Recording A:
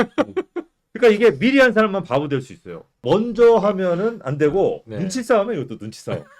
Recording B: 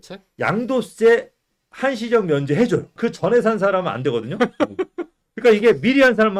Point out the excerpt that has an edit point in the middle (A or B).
A